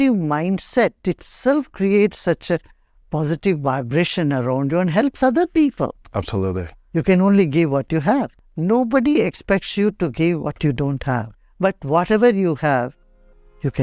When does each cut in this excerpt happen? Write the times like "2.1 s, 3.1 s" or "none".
6.8 s, 8.4 s, 11.4 s